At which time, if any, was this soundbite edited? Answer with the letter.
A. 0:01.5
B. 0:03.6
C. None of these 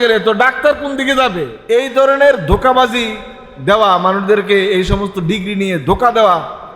A